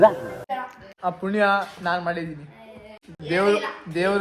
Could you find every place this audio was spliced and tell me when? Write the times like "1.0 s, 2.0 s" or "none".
3.2 s